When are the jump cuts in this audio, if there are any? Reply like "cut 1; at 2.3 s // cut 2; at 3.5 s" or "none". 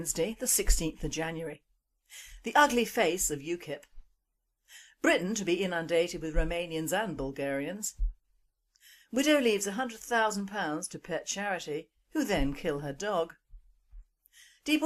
cut 1; at 11.2 s